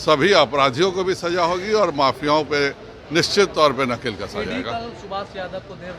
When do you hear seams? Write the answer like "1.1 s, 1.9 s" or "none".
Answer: none